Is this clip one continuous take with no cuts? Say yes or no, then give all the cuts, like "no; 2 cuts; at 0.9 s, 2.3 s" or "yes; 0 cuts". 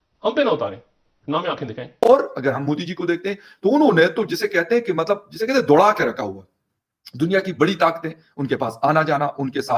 no; 1 cut; at 1.8 s